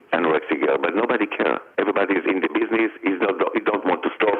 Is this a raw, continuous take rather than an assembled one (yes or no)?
yes